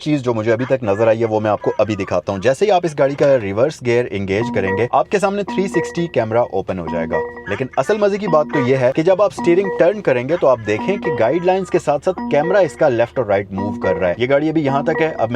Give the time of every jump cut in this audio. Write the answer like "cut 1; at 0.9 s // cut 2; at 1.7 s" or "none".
cut 1; at 4.9 s // cut 2; at 9.0 s // cut 3; at 14.2 s

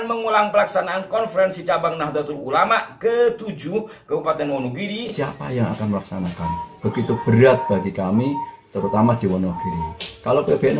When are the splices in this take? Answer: cut 1; at 5.1 s

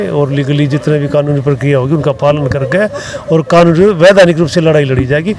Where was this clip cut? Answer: none

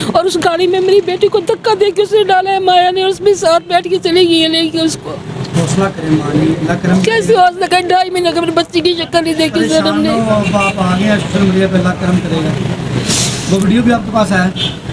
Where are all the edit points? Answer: none

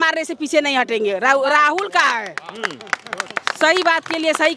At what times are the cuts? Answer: none

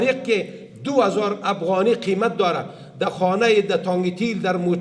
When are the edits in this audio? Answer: none

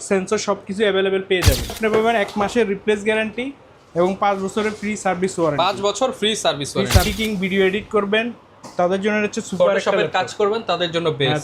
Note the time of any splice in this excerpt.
cut 1; at 1.8 s // cut 2; at 7.1 s

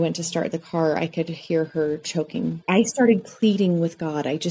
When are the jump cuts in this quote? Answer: cut 1; at 2.6 s

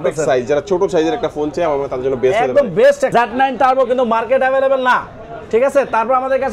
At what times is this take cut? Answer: cut 1; at 3.1 s

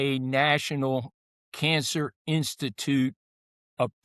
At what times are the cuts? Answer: none

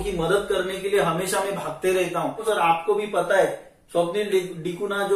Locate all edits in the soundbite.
cut 1; at 2.4 s

